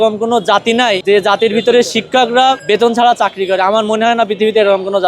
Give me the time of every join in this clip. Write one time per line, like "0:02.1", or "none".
0:01.0
0:02.6